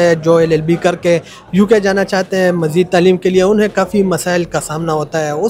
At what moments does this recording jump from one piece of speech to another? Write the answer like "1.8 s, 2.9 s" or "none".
none